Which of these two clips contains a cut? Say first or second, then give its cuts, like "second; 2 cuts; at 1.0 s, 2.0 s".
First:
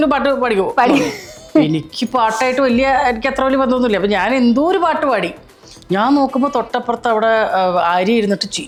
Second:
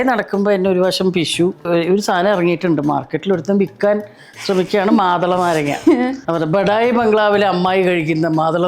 second; 2 cuts; at 1.7 s, 6.2 s